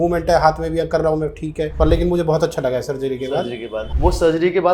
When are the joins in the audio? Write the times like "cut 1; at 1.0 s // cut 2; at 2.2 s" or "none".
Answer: cut 1; at 1.7 s // cut 2; at 3.8 s